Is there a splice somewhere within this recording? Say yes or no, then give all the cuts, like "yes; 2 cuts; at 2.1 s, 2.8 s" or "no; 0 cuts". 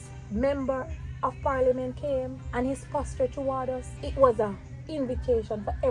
yes; 2 cuts; at 2.4 s, 4.0 s